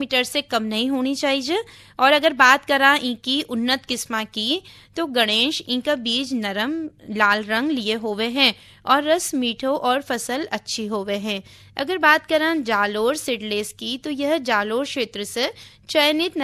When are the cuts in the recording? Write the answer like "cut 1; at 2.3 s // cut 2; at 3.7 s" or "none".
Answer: none